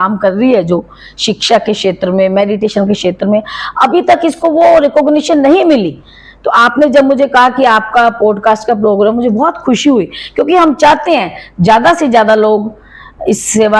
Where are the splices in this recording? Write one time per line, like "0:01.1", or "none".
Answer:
none